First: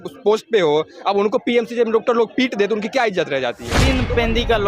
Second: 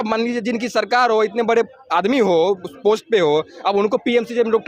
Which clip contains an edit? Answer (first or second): first